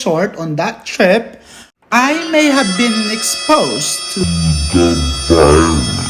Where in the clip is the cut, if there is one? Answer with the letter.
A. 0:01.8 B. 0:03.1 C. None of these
C